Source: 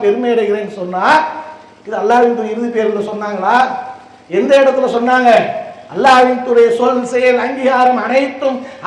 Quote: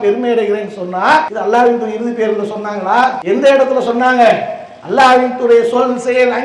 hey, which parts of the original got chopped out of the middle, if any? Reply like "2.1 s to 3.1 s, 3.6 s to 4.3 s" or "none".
1.3 s to 1.9 s, 3.8 s to 4.3 s